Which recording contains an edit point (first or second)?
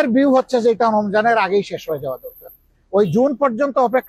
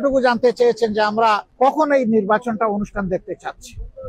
second